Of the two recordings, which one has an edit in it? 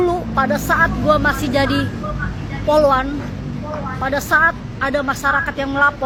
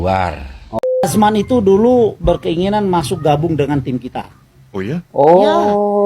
second; 2 cuts; at 1.1 s, 5.2 s

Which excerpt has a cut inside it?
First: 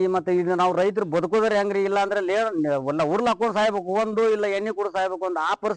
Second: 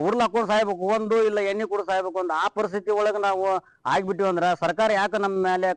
first; 1 cut; at 1.0 s

